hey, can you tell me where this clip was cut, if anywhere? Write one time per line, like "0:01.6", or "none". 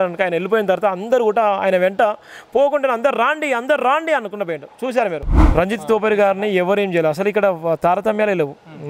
0:05.3

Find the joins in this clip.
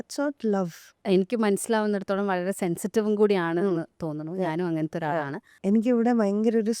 0:00.9
0:05.4

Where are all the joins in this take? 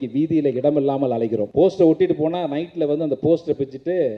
0:01.5

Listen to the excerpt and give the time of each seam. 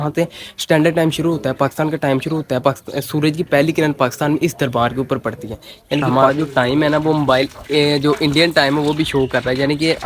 0:06.1

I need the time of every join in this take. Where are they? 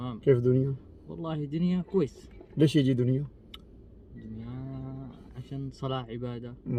none

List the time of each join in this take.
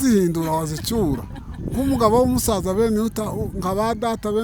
none

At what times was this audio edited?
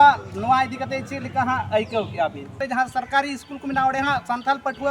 0:02.5

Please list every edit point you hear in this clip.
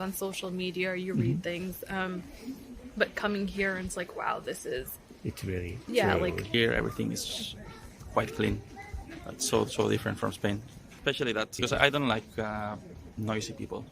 0:06.5

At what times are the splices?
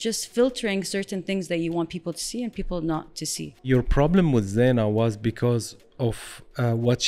0:03.7

